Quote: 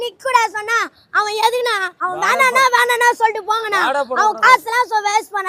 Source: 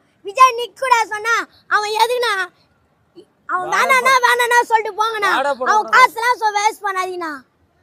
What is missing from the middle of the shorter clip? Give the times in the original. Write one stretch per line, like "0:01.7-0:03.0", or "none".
0:02.5-0:03.4